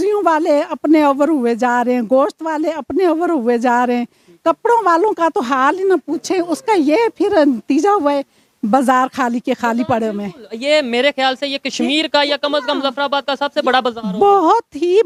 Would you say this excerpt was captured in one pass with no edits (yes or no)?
yes